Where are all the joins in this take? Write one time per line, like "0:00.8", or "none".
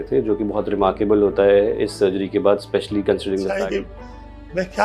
0:03.5